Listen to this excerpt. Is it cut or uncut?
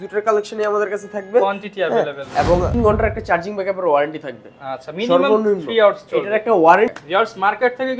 cut